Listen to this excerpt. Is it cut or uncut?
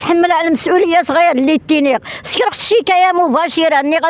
uncut